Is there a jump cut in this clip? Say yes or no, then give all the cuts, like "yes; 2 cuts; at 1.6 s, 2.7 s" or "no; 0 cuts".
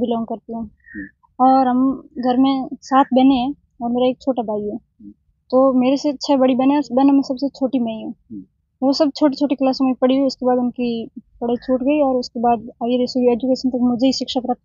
no; 0 cuts